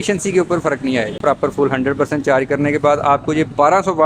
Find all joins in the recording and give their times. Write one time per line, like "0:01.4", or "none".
0:01.2

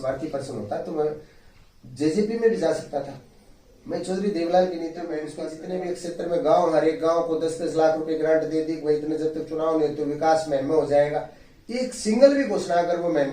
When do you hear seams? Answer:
0:05.4

